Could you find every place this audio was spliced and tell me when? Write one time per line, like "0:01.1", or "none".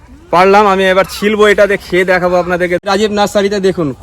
0:02.9